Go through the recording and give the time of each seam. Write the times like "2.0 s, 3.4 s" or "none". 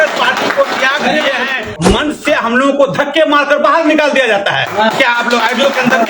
1.7 s